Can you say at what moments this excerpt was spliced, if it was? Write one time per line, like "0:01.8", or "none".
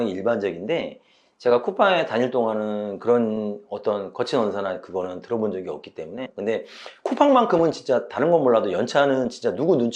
0:06.3

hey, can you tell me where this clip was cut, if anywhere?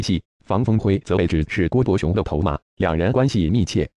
0:02.0

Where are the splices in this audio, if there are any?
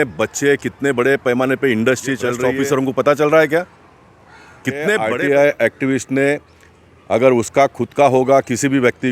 0:02.9
0:04.9

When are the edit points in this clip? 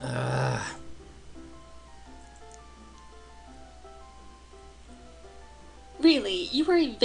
0:05.5

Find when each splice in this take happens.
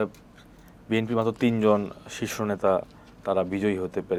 none

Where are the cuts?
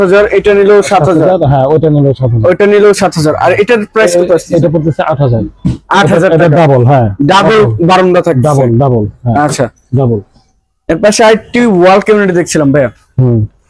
none

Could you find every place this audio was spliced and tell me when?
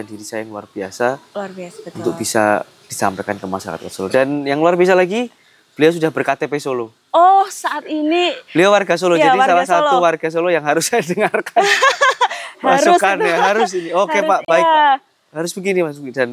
none

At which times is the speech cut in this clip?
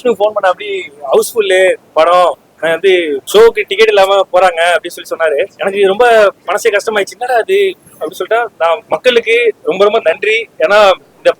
0:03.2
0:05.5
0:08.8

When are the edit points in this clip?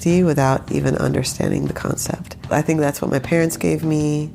0:02.3

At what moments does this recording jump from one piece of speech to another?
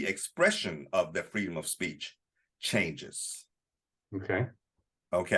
none

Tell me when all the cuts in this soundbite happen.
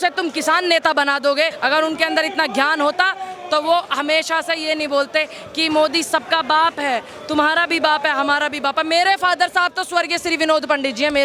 0:01.6

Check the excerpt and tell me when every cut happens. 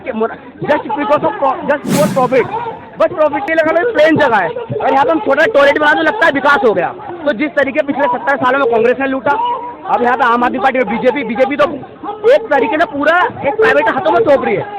0:03.4

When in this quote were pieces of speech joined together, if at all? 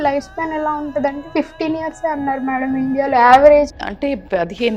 0:03.7

